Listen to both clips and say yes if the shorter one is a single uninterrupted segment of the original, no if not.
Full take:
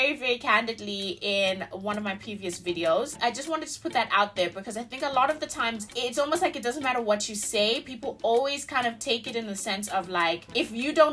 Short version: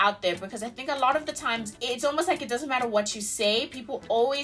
yes